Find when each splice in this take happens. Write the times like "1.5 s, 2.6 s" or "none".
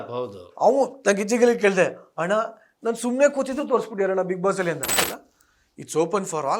5.1 s